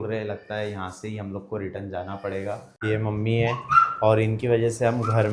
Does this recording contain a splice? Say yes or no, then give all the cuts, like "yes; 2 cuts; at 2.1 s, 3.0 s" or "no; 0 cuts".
yes; 1 cut; at 2.7 s